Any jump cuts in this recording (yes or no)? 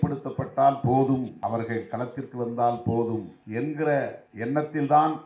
yes